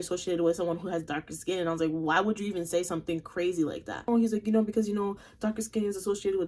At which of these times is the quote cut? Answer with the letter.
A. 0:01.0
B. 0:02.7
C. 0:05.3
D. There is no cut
D